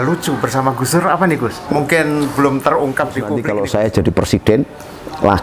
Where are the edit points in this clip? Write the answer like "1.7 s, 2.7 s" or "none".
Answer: 1.7 s, 3.4 s